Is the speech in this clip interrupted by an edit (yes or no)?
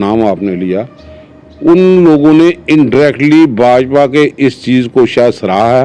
no